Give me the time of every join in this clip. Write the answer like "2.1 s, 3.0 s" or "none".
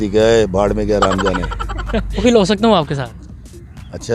2.2 s